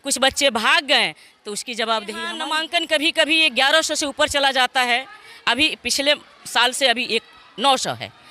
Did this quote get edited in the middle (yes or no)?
yes